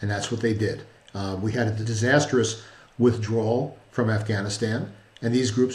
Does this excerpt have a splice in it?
yes; 1 cut; at 1.8 s

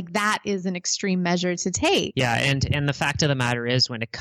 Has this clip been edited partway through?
yes; 1 cut; at 2.1 s

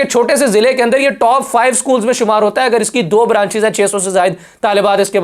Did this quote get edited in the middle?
no; 0 cuts

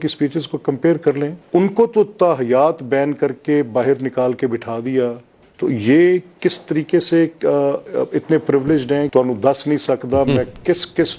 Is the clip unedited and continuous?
no; 2 cuts; at 1.4 s, 9.1 s

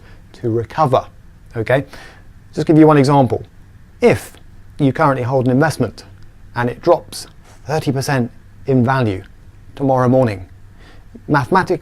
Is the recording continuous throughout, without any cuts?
no; 1 cut; at 2.1 s

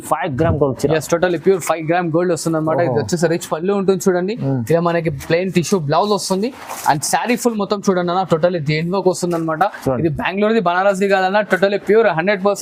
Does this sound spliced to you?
no; 0 cuts

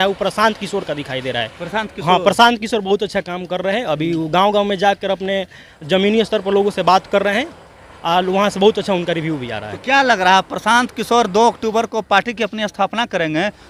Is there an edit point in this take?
no; 0 cuts

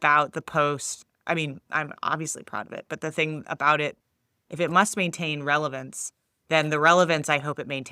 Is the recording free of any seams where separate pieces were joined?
no; 2 cuts; at 0.9 s, 4.0 s

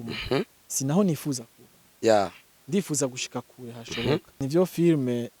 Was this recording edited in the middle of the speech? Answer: yes; 1 cut; at 4.3 s

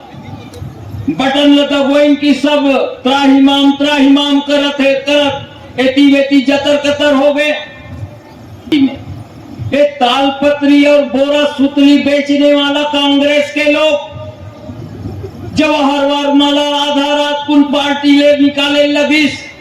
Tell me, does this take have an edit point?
yes; 1 cut; at 8.7 s

